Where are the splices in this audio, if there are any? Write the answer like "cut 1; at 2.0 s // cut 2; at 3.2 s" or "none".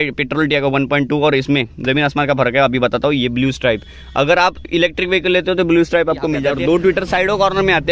cut 1; at 6.5 s